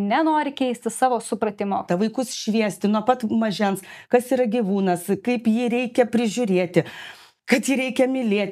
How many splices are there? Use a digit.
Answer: 2